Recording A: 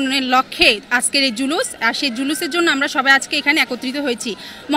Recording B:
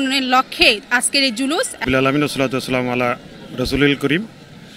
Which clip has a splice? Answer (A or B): B